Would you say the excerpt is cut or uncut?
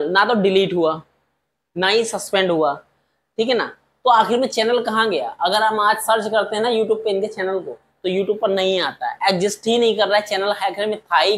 uncut